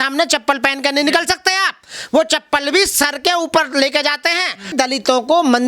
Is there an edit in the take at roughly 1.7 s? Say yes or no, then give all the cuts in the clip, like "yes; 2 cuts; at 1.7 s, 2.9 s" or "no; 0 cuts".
no; 1 cut; at 4.7 s